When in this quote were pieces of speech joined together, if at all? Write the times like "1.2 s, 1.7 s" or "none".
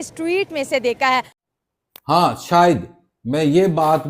1.3 s